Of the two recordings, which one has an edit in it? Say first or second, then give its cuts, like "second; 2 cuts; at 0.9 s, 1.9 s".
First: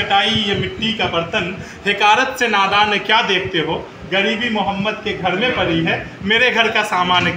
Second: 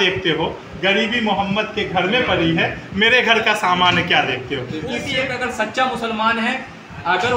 second; 1 cut; at 5.0 s